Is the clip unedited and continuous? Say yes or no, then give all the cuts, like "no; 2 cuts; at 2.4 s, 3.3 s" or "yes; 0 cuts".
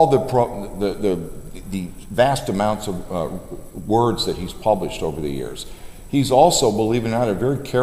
yes; 0 cuts